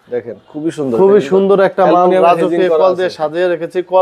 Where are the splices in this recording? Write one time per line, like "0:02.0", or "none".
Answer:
none